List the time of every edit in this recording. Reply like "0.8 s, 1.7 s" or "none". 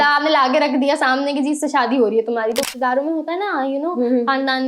2.6 s